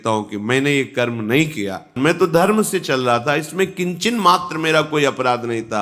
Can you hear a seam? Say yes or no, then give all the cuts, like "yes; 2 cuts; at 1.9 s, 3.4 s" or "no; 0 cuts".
yes; 1 cut; at 1.9 s